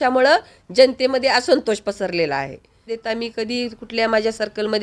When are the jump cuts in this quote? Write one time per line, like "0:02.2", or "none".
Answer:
0:02.8